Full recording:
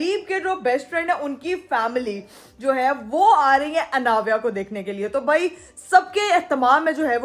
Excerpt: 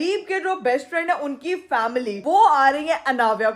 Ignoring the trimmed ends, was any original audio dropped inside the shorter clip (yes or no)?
yes